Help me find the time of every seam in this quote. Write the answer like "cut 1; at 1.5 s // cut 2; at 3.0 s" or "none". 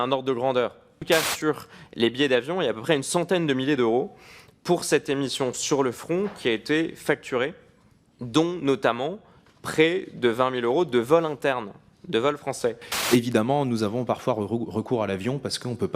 cut 1; at 1.0 s // cut 2; at 12.9 s

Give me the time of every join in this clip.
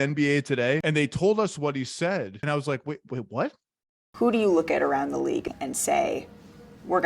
cut 1; at 0.8 s // cut 2; at 2.4 s // cut 3; at 5.5 s

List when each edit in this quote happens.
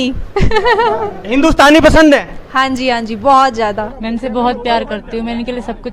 cut 1; at 3.9 s

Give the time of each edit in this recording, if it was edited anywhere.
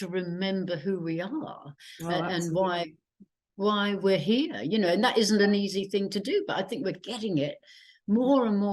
none

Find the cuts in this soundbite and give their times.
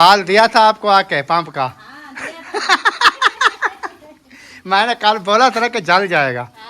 none

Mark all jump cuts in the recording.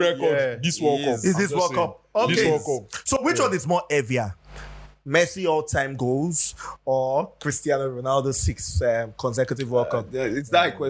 none

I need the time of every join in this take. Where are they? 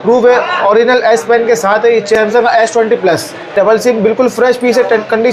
cut 1; at 2.1 s // cut 2; at 3.5 s

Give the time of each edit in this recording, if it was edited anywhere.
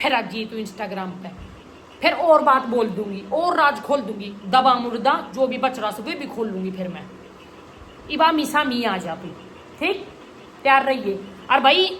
none

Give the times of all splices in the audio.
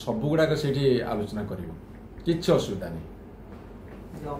none

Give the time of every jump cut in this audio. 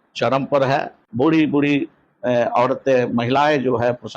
cut 1; at 1.0 s

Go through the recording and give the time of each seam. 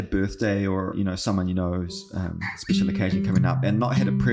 cut 1; at 0.9 s

